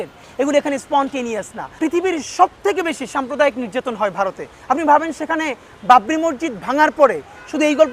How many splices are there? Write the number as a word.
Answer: one